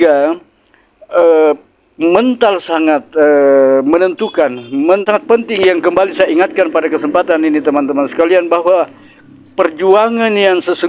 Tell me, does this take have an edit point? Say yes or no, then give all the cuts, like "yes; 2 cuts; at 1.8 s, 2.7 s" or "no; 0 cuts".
yes; 1 cut; at 5.0 s